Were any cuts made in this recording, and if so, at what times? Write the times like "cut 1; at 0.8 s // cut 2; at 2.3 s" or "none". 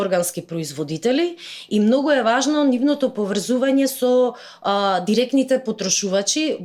none